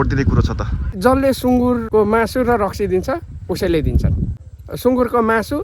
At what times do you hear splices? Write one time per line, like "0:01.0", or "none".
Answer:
0:01.0
0:01.8
0:04.7